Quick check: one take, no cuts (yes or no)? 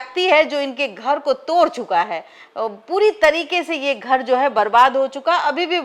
yes